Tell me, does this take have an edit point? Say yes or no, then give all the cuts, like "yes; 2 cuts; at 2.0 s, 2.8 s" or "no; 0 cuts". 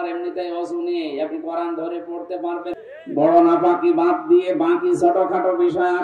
yes; 1 cut; at 2.7 s